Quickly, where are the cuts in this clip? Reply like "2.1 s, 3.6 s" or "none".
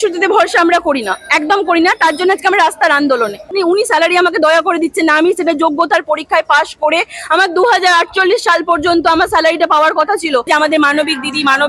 3.5 s, 10.5 s

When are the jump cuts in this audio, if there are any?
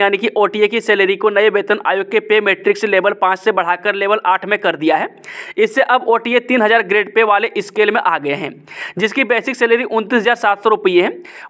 none

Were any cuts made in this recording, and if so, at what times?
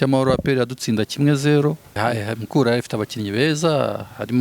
2.0 s

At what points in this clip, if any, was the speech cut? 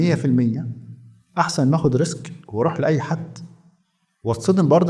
none

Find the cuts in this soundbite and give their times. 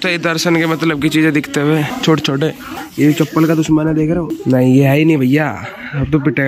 1.9 s, 2.8 s, 4.3 s

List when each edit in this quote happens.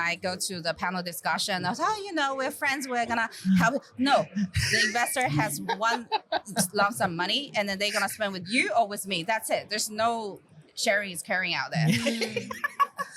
none

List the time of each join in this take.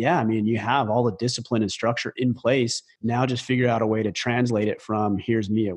2.9 s

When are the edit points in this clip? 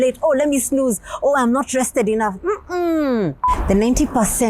3.5 s

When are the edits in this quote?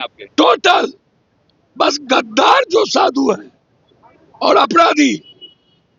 none

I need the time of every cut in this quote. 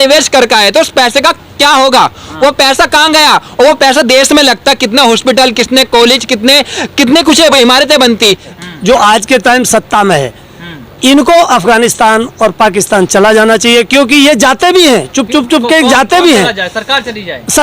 8.5 s

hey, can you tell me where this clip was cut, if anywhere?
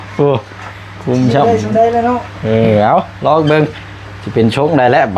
none

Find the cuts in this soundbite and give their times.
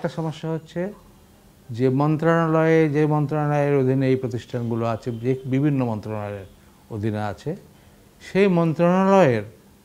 none

